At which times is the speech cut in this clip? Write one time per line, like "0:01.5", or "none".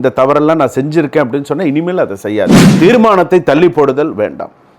0:02.6